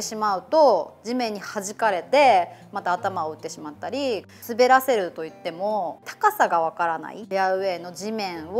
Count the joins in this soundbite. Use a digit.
3